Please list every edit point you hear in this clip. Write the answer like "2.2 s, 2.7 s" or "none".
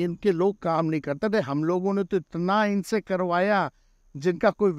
none